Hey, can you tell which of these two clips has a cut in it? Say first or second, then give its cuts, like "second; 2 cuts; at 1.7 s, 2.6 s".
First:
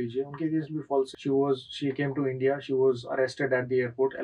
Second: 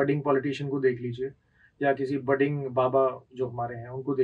first; 1 cut; at 1.2 s